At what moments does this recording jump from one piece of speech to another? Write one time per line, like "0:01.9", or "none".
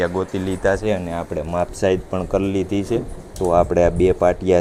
none